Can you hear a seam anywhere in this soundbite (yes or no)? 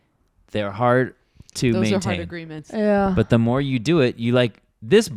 no